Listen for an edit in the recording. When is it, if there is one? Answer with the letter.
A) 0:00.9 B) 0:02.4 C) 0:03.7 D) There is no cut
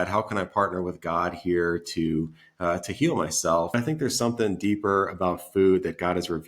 C